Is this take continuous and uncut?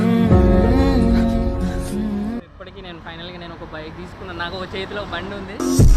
no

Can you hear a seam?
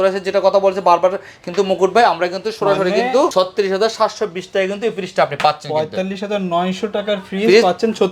no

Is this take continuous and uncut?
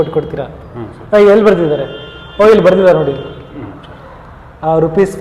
yes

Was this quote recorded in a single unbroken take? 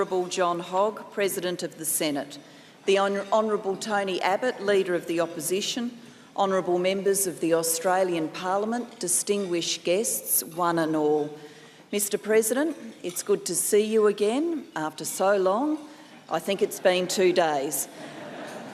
yes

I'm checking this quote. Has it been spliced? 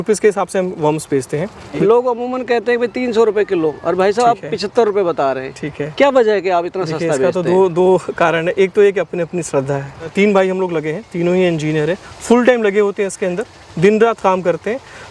yes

